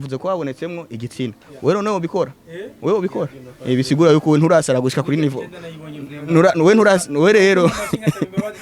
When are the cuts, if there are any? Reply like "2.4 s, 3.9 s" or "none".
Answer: none

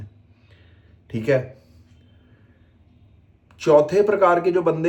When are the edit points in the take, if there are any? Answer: none

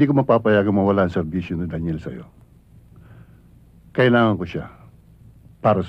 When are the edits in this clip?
none

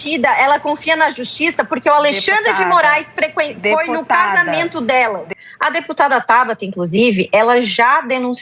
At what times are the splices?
5.3 s

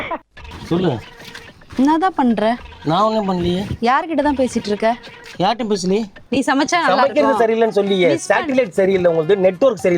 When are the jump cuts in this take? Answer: 6.2 s

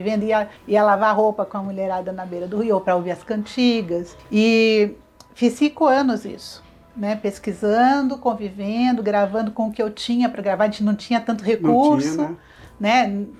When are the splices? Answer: none

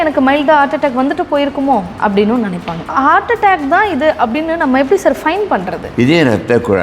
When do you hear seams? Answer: 2.9 s, 5.8 s

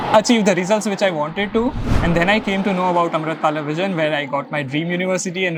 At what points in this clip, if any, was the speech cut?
none

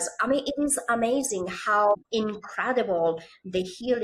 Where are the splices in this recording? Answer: 2.0 s

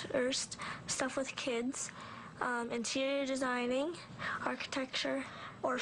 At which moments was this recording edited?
none

